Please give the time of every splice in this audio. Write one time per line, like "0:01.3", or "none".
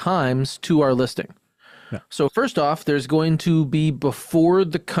none